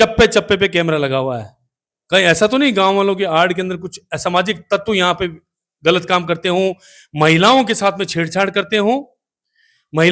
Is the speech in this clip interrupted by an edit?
no; 0 cuts

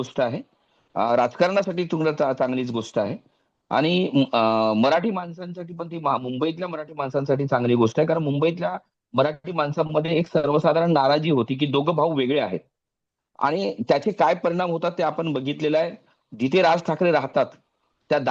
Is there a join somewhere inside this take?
no; 0 cuts

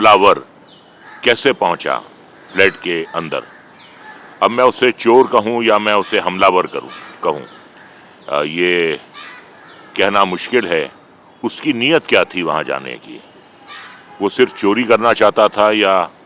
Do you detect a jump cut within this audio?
no; 0 cuts

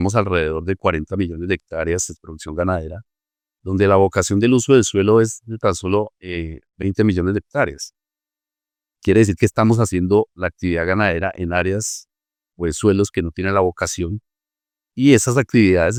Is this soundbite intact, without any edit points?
yes; 0 cuts

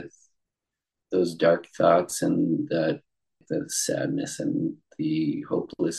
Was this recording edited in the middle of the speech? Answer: yes; 1 cut; at 3.4 s

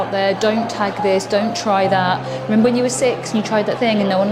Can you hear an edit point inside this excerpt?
no; 0 cuts

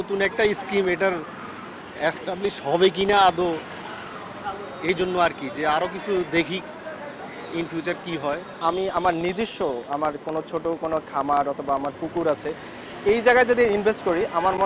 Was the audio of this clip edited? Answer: no; 0 cuts

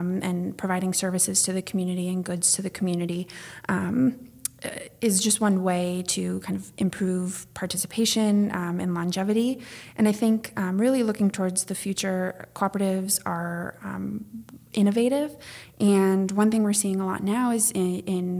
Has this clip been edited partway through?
no; 0 cuts

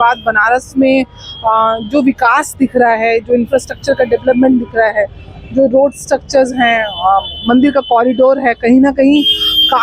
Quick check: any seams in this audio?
no; 0 cuts

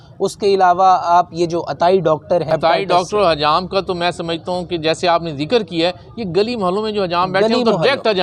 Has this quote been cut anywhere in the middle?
yes; 1 cut; at 2.5 s

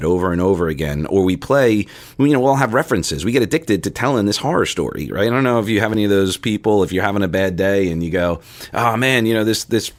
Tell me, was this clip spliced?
no; 0 cuts

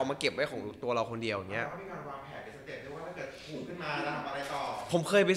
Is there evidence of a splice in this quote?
no; 0 cuts

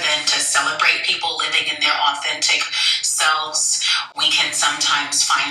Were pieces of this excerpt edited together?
no; 0 cuts

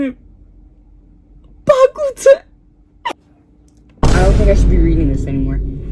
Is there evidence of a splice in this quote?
yes; 1 cut; at 3.1 s

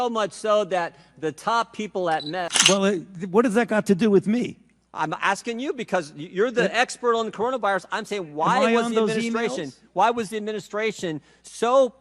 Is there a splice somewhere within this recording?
yes; 1 cut; at 2.5 s

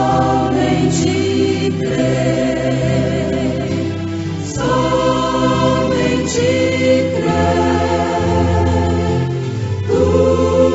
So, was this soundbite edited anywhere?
no; 0 cuts

